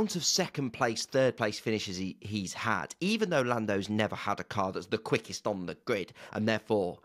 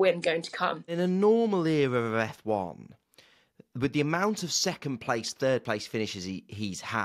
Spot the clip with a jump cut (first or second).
second